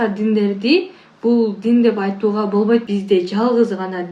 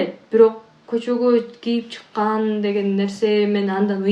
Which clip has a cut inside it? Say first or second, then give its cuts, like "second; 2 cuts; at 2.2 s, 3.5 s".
first; 1 cut; at 2.9 s